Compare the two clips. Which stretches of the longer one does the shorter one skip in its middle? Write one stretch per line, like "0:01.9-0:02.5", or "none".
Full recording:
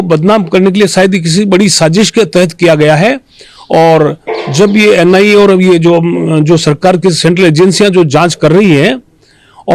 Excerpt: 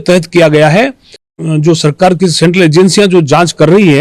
0:03.6-0:06.2